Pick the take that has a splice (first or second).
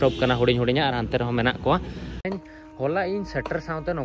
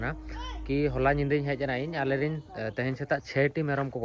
first